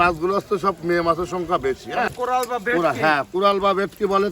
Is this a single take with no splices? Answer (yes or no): no